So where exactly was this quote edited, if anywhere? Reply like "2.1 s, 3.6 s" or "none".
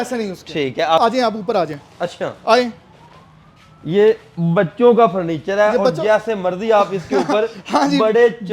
1.0 s